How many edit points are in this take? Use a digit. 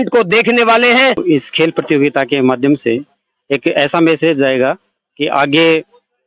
1